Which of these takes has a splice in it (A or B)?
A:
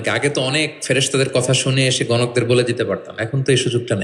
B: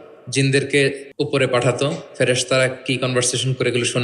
B